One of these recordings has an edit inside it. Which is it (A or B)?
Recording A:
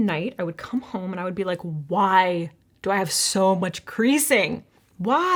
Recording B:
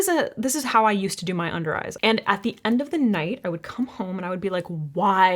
B